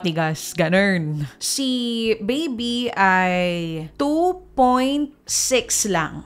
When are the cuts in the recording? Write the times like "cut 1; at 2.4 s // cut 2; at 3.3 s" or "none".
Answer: cut 1; at 1.2 s